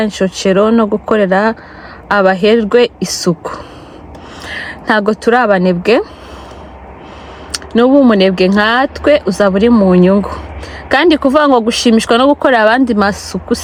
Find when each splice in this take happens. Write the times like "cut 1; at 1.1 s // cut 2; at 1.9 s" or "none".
none